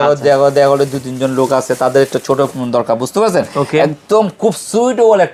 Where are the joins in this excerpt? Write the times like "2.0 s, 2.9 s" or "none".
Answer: none